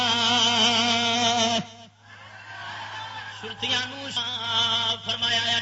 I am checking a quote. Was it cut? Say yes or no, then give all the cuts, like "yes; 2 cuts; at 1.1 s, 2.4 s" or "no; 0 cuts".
yes; 1 cut; at 4.2 s